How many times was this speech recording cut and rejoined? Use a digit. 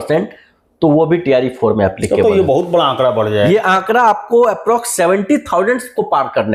0